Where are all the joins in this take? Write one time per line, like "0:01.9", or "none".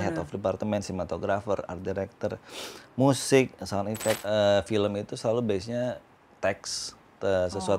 0:04.2

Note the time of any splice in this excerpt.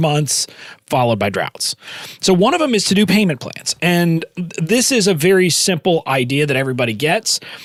none

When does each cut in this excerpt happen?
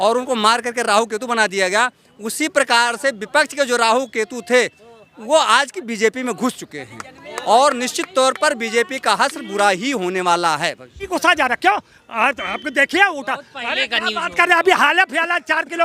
0:11.1

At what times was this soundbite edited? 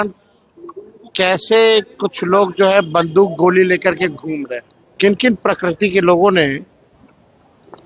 0:04.9

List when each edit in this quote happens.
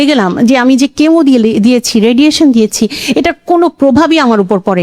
none

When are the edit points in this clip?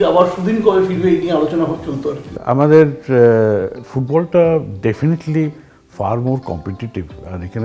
0:02.3

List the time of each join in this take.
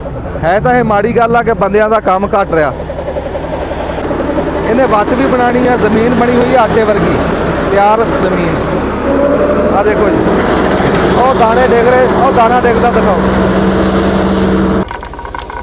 0:04.0
0:14.8

